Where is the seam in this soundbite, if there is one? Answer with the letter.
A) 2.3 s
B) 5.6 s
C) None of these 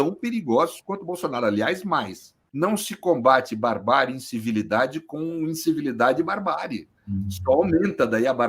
A